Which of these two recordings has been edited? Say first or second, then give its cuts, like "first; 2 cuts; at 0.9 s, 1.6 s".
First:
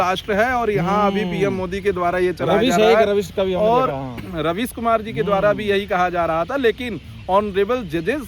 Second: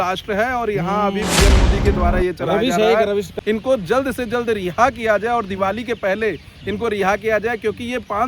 second; 1 cut; at 3.3 s